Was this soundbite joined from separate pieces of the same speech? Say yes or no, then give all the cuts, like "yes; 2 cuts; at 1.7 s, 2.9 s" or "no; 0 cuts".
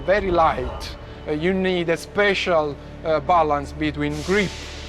no; 0 cuts